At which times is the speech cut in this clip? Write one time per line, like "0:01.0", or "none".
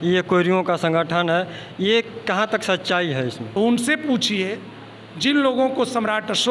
0:03.5